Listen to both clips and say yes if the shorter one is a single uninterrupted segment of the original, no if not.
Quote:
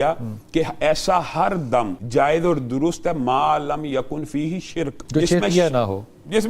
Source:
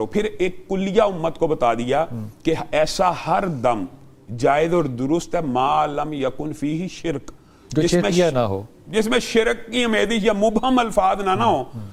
no